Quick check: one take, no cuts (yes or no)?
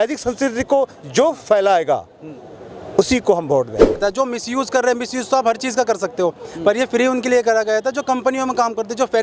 no